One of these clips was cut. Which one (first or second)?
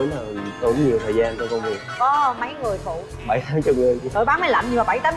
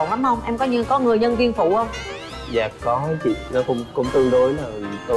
first